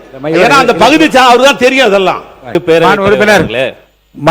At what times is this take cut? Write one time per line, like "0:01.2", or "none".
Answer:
0:02.6